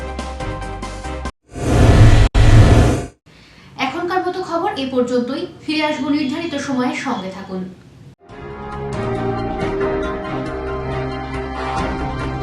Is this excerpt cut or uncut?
uncut